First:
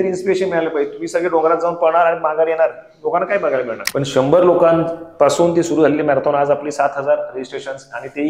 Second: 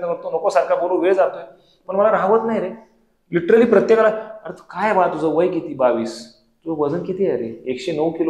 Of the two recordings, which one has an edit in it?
first; 1 cut; at 3.8 s

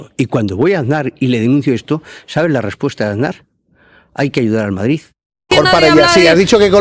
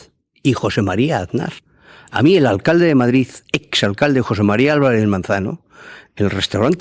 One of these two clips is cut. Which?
first; 1 cut; at 5.5 s

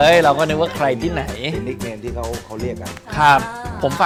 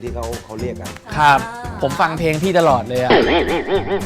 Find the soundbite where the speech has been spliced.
second; 1 cut; at 3.0 s

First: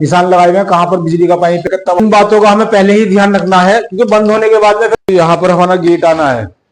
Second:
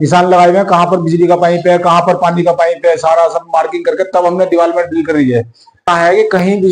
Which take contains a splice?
first; 2 cuts; at 1.6 s, 5.1 s

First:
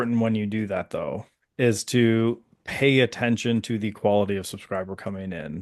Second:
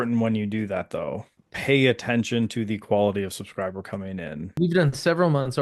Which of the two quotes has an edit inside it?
second; 2 cuts; at 1.4 s, 4.5 s

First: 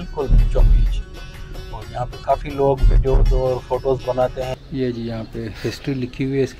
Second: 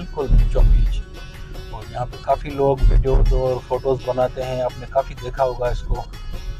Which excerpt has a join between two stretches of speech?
first; 1 cut; at 4.5 s

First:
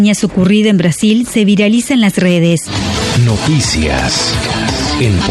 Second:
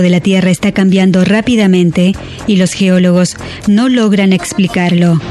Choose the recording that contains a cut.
first; 1 cut; at 2.8 s

